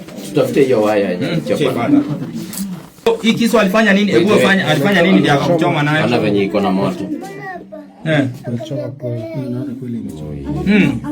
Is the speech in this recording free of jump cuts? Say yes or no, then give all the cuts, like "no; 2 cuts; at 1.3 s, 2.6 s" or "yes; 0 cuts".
no; 1 cut; at 3.1 s